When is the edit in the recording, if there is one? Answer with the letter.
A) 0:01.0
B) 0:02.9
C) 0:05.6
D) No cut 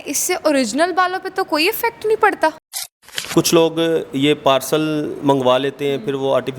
B